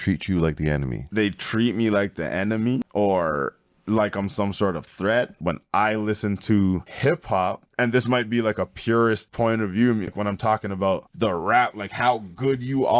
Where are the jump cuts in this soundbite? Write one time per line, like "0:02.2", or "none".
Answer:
0:01.0
0:02.9
0:05.4
0:07.2
0:09.3
0:10.1
0:11.1

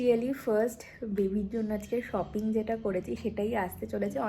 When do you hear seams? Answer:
none

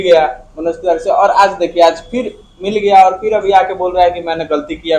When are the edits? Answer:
none

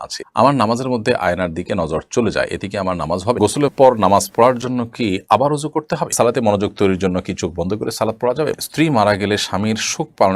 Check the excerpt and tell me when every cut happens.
0:03.4
0:06.1
0:08.5

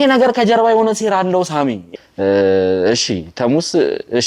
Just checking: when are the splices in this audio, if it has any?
0:01.8

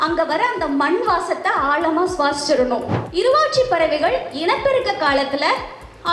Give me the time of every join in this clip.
0:03.0

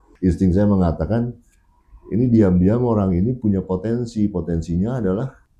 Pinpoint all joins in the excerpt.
none

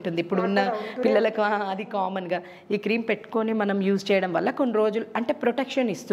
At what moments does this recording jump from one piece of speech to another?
none

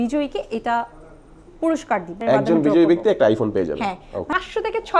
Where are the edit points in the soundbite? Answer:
0:02.2
0:04.3

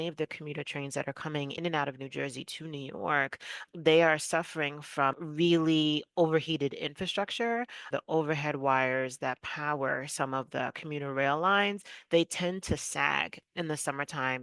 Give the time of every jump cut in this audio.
0:01.6
0:03.6
0:05.2
0:07.8

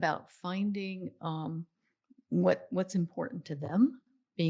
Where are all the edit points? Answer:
none

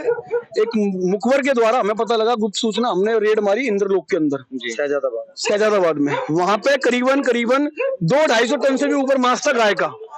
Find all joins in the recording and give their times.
none

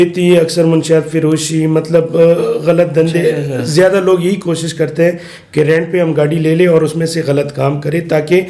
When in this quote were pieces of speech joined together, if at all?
none

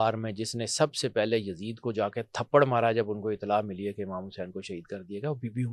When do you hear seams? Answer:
none

